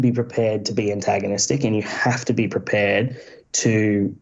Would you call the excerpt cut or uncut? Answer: uncut